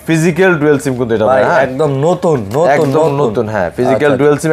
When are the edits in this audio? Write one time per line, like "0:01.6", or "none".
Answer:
none